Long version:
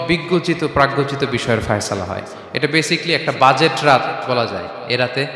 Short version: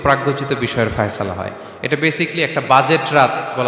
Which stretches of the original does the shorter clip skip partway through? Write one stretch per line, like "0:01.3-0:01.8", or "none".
none